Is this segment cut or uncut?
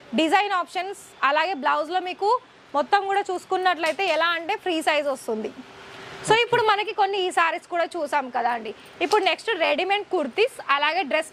uncut